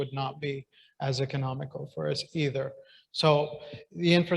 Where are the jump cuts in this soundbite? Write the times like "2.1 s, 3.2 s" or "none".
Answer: none